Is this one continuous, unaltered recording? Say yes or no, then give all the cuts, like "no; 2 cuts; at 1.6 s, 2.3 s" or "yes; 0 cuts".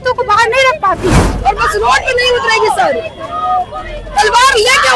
no; 1 cut; at 1.3 s